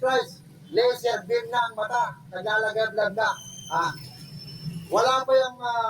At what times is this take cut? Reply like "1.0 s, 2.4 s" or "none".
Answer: 3.8 s